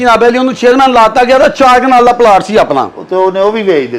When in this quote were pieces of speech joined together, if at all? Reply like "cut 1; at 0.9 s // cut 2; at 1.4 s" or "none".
none